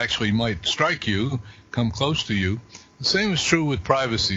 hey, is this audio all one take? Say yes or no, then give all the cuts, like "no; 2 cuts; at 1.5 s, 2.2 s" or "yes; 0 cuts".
yes; 0 cuts